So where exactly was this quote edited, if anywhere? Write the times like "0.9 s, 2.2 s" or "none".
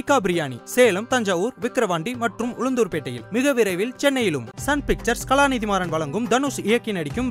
none

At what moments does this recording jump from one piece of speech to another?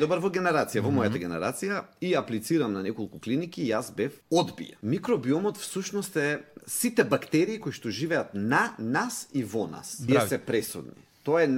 4.7 s, 10.1 s

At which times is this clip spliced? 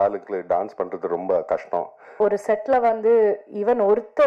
2.1 s

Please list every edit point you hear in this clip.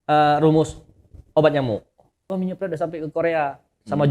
2.3 s

